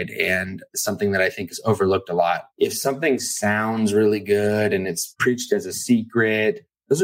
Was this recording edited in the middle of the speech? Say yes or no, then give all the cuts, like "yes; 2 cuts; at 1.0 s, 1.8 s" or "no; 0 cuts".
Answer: yes; 3 cuts; at 0.8 s, 2.5 s, 5.1 s